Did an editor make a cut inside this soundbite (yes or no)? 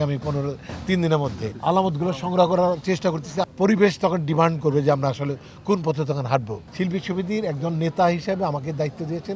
yes